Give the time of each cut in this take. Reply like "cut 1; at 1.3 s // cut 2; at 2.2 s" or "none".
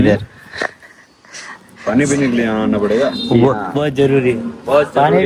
none